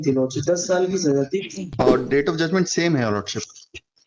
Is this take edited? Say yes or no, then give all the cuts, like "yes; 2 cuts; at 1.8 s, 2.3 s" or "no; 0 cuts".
yes; 1 cut; at 1.7 s